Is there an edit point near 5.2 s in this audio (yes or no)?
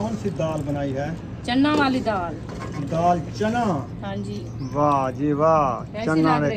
no